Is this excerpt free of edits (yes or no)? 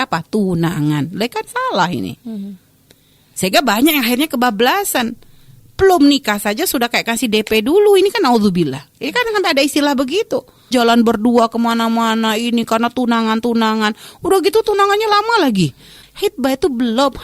no